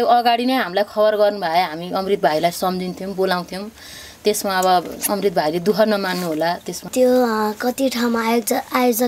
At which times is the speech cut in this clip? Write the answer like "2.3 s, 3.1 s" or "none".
6.9 s